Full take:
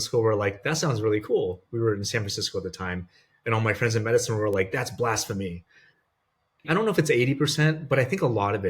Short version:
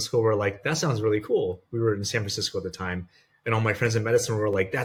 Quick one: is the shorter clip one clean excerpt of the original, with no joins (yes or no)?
yes